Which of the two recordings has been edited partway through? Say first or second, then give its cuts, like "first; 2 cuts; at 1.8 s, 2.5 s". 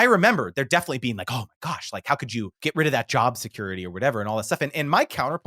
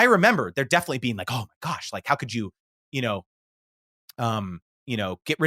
first; 1 cut; at 2.6 s